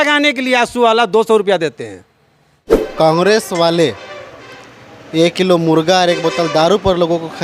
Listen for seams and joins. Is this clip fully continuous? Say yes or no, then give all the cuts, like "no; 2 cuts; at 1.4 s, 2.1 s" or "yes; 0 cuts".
no; 1 cut; at 2.7 s